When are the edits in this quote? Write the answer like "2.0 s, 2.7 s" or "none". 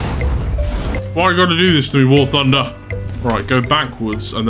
1.0 s